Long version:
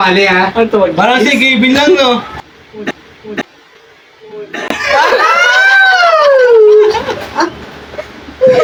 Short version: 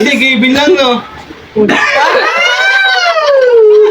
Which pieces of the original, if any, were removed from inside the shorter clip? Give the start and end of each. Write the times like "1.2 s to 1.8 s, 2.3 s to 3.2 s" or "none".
2.8 s to 4.6 s